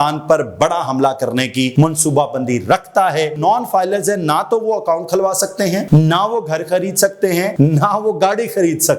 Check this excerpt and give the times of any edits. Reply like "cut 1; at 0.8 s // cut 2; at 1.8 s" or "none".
cut 1; at 1.7 s // cut 2; at 3.4 s // cut 3; at 5.8 s // cut 4; at 7.5 s